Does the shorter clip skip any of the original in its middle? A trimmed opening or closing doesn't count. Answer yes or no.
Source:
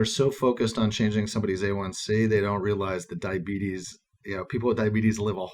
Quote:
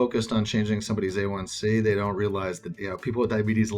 yes